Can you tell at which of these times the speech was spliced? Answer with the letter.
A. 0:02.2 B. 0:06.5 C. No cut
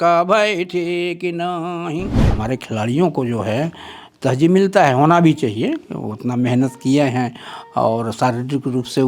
A